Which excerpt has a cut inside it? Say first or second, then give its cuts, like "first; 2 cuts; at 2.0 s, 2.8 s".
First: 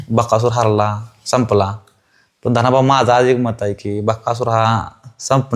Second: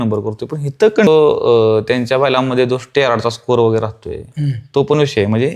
second; 1 cut; at 1.1 s